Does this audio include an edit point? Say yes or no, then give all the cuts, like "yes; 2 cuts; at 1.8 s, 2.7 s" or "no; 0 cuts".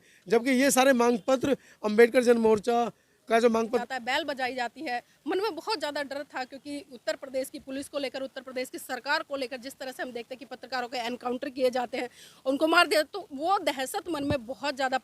yes; 1 cut; at 3.8 s